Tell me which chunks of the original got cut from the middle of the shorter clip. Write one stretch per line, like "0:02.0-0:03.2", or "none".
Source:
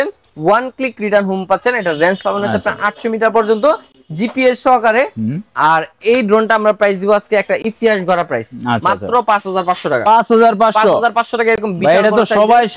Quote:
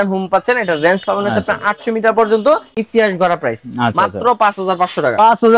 0:04.0-0:07.7